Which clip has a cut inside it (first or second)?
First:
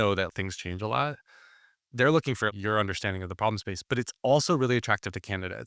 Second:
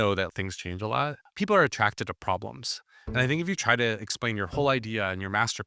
second